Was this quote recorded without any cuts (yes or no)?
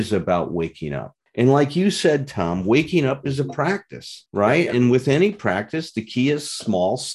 yes